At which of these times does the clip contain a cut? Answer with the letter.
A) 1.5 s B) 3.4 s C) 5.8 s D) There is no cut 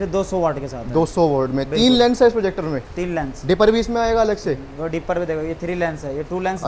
D